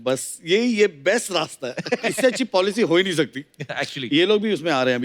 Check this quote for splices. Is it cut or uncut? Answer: uncut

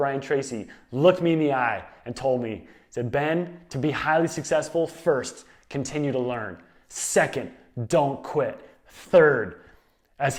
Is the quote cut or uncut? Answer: uncut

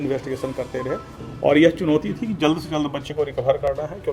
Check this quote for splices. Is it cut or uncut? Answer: uncut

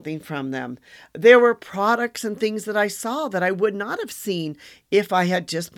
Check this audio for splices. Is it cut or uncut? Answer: uncut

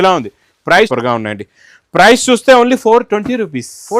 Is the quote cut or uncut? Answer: cut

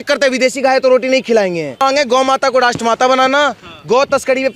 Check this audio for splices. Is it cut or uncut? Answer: cut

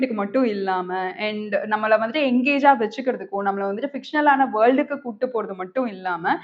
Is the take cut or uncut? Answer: uncut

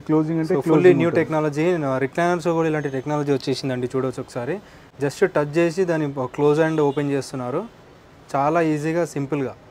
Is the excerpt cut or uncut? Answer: uncut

